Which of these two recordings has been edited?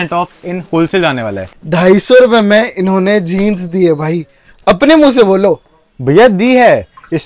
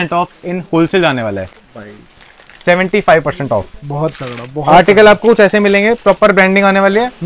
first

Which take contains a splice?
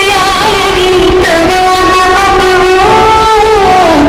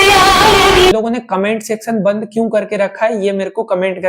second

